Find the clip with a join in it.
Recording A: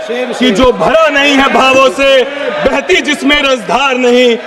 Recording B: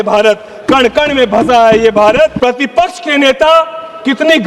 B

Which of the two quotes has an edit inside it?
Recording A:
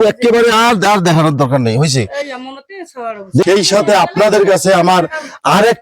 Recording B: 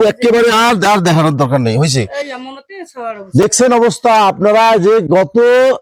A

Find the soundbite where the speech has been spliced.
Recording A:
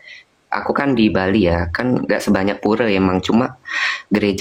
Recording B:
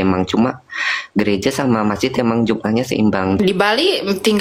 B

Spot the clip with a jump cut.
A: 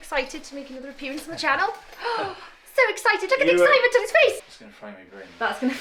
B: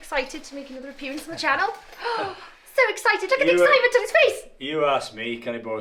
A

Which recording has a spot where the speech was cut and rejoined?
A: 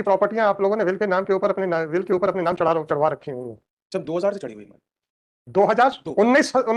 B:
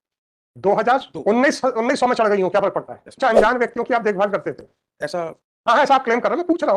B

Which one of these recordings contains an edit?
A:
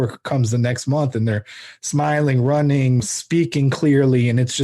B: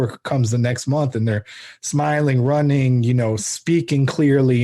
A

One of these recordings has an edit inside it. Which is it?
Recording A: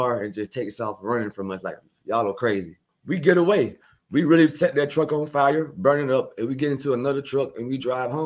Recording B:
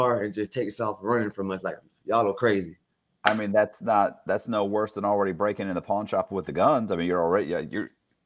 A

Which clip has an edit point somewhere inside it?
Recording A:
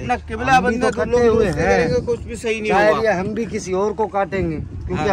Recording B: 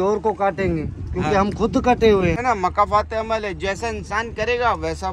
B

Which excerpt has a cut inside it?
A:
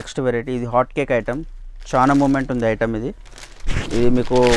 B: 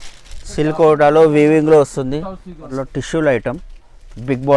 B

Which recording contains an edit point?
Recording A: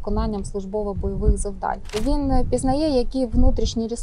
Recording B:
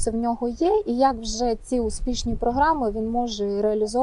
A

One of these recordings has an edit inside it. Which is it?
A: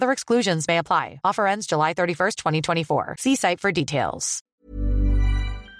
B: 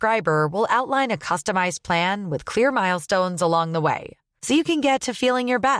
A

